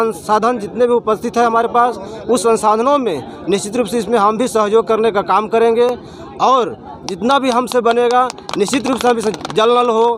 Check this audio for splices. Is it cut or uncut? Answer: uncut